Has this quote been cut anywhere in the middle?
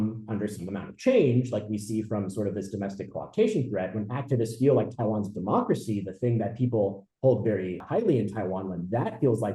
yes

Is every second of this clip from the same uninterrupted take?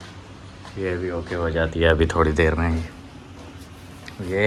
yes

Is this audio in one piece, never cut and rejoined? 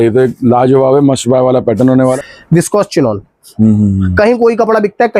no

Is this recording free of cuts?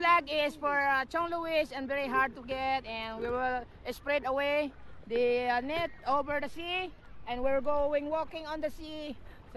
yes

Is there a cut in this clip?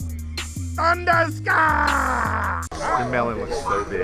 yes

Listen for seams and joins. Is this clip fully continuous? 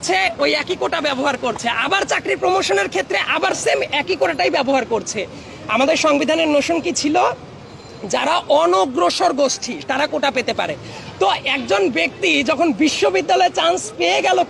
yes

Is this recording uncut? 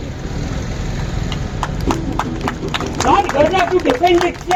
yes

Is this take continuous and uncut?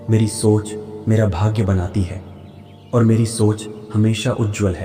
yes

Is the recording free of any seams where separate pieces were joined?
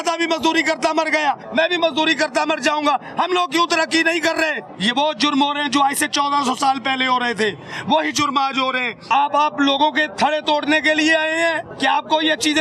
no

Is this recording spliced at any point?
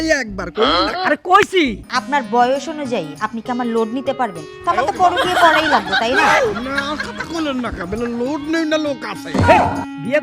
yes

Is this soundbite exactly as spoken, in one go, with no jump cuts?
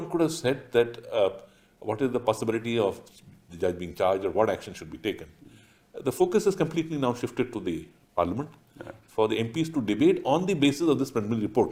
yes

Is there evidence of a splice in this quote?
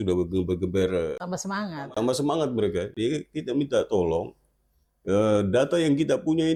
no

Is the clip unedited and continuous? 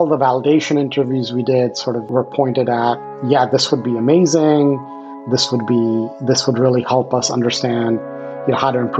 no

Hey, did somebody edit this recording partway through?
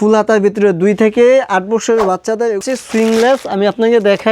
yes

